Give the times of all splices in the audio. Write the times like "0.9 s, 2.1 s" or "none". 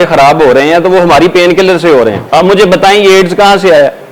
2.2 s